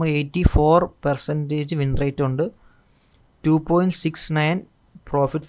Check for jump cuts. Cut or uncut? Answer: uncut